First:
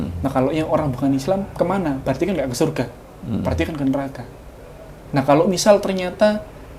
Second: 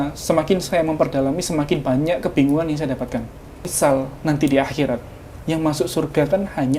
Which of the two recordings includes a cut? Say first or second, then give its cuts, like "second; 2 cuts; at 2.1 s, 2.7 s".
second; 1 cut; at 3.7 s